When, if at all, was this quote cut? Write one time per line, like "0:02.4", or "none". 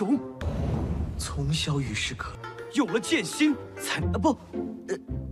none